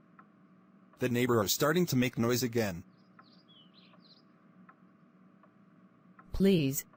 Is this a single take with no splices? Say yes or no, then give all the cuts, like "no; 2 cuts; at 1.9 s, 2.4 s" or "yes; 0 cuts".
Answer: yes; 0 cuts